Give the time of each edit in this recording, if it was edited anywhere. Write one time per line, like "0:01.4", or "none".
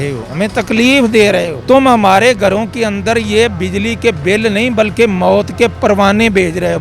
0:01.5

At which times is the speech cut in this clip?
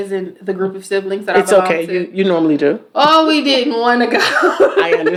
none

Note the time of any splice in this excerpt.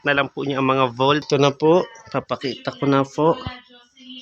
0:01.3

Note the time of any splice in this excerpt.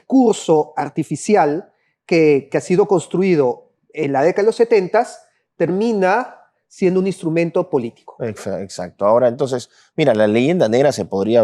none

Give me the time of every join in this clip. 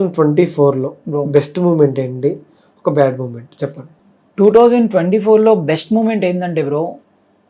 none

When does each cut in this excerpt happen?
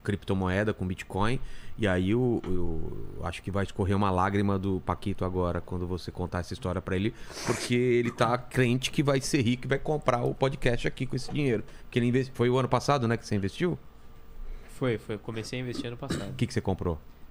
none

